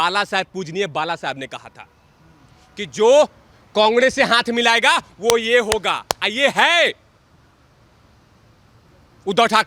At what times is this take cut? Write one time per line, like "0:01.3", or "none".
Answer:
none